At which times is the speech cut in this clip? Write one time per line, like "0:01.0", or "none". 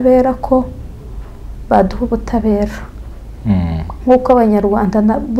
none